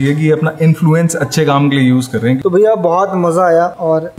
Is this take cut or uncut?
cut